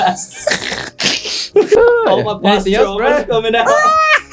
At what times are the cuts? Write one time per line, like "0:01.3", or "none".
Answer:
0:01.8